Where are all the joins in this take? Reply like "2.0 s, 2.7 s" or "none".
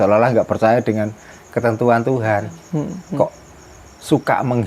3.0 s